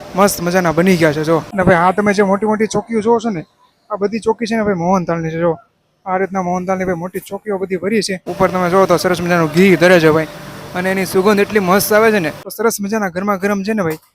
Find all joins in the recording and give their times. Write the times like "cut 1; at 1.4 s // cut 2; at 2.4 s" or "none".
cut 1; at 1.5 s // cut 2; at 8.3 s // cut 3; at 12.4 s

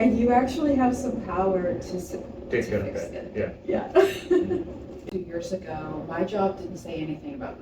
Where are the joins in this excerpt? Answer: cut 1; at 5.1 s

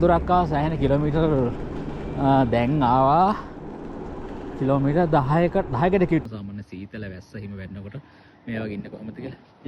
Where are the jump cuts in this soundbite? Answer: cut 1; at 6.2 s

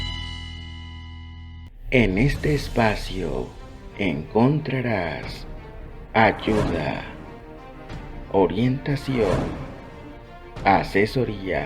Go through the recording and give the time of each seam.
cut 1; at 1.7 s

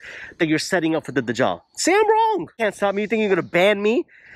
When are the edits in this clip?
cut 1; at 2.5 s

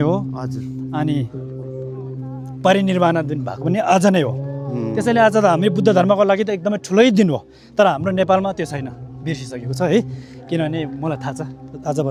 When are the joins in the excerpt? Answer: none

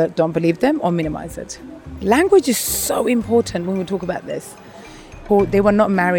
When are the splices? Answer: cut 1; at 1.9 s // cut 2; at 5.1 s

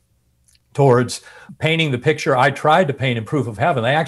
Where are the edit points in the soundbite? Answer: cut 1; at 1.4 s

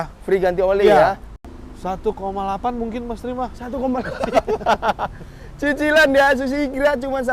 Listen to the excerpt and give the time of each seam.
cut 1; at 1.4 s

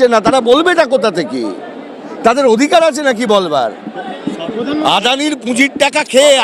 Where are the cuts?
none

